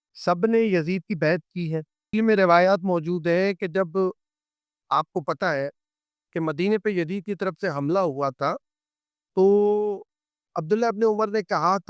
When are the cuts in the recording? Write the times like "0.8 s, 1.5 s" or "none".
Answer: 2.1 s